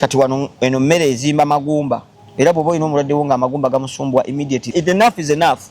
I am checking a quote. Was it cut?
yes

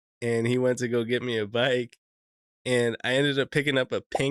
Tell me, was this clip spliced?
no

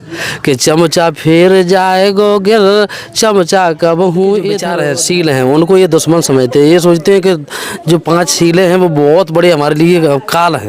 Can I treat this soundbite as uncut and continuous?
no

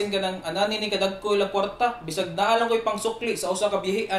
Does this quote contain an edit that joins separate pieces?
no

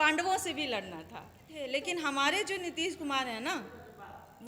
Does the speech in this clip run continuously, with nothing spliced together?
no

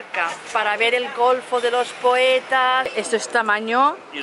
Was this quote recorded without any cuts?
no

